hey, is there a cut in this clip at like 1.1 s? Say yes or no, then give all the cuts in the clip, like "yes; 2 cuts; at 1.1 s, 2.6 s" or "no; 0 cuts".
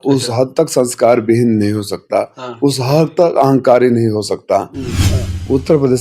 no; 1 cut; at 4.9 s